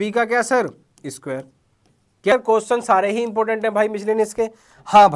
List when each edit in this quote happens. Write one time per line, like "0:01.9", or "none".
0:02.3